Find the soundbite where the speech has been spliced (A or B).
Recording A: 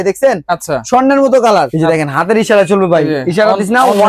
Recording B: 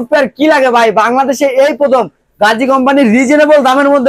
A